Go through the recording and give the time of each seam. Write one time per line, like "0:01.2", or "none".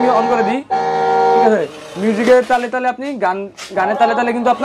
none